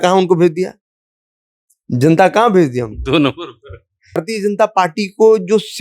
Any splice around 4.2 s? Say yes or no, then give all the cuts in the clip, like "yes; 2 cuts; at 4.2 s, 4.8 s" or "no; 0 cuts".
yes; 1 cut; at 4.2 s